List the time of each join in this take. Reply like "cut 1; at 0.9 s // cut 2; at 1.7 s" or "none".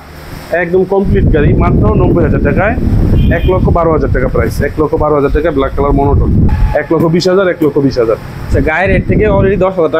cut 1; at 3.1 s // cut 2; at 6.5 s